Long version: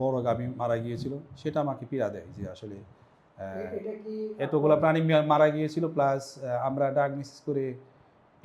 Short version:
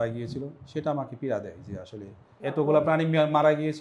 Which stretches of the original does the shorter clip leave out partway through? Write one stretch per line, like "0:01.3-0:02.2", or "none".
0:03.1-0:04.3